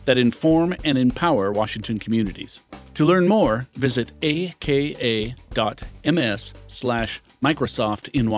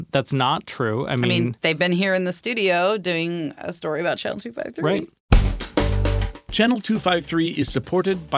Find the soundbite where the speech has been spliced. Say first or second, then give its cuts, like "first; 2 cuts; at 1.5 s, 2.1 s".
second; 1 cut; at 5.2 s